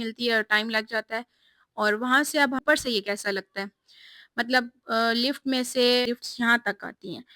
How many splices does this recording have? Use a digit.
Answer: 2